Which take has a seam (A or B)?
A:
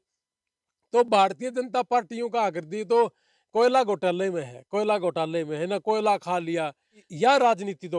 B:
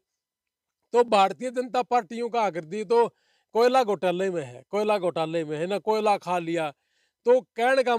A